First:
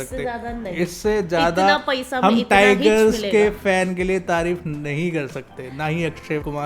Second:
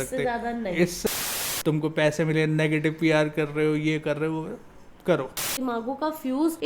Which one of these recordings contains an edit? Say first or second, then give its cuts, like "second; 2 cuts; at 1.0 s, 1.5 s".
second; 2 cuts; at 1.1 s, 5.5 s